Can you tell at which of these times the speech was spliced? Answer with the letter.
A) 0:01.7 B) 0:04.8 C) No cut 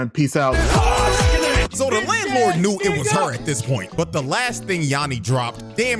A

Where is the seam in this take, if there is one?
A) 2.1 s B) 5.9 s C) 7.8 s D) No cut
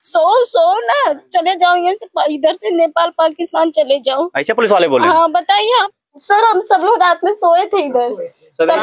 B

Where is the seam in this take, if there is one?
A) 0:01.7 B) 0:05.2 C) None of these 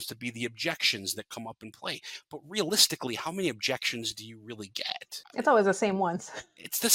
B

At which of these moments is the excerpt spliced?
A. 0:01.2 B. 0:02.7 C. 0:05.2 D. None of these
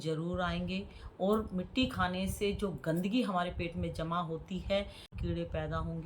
C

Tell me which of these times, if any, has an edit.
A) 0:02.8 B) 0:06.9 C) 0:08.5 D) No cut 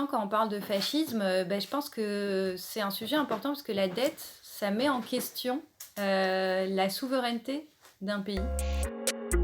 C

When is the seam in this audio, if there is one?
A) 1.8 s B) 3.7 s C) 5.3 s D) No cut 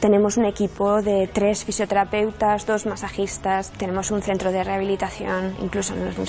B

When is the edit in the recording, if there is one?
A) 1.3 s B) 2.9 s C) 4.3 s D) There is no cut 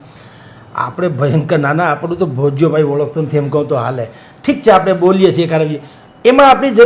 D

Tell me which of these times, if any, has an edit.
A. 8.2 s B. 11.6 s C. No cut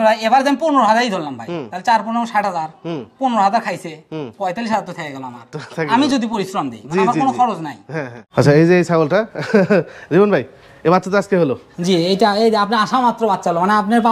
A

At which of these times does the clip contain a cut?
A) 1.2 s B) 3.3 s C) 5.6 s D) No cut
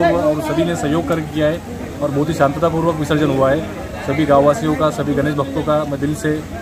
D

